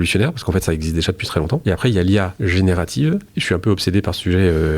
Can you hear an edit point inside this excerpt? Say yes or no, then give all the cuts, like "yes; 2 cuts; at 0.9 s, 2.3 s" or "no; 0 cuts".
yes; 3 cuts; at 1.6 s, 2.3 s, 3.3 s